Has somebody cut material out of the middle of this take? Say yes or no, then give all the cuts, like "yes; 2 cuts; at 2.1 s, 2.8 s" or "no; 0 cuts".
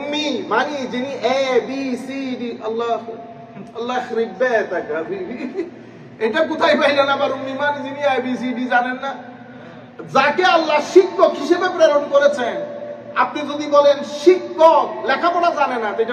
no; 0 cuts